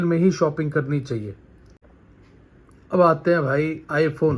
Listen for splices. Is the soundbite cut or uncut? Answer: cut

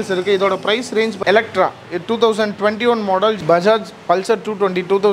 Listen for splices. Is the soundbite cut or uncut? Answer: cut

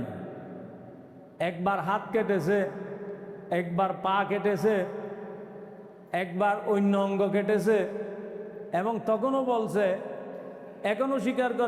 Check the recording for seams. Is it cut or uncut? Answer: uncut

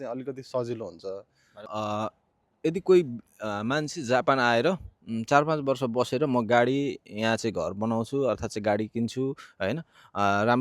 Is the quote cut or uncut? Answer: cut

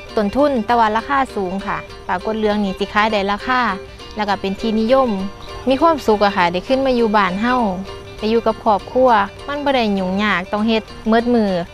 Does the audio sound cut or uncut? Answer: cut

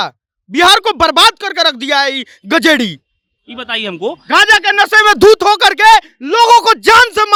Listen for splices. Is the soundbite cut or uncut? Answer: uncut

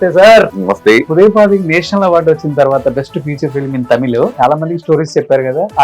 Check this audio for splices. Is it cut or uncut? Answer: cut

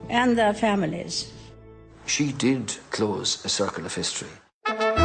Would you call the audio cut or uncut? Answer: cut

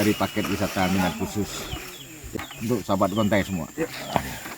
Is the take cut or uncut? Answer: cut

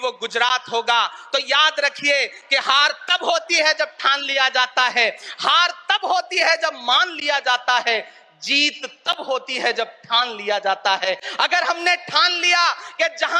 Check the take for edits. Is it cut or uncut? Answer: uncut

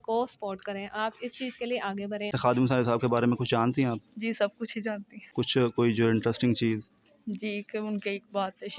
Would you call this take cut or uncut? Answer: cut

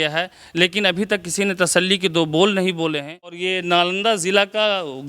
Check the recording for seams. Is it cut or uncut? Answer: cut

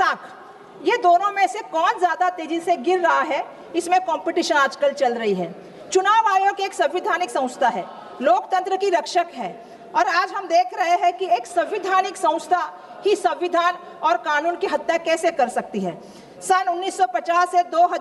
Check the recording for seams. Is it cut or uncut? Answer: uncut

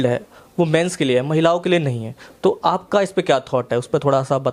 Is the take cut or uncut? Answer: uncut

